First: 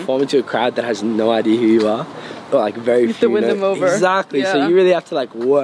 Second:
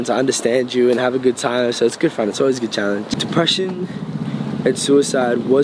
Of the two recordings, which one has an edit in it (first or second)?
second